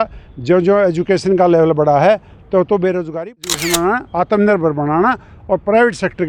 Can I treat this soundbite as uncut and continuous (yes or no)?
no